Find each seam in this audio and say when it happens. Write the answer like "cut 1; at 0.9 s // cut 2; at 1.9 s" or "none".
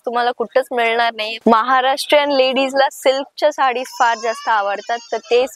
cut 1; at 1.3 s